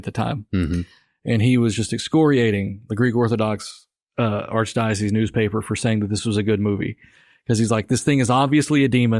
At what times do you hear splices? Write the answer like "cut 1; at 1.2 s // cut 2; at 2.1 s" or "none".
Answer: none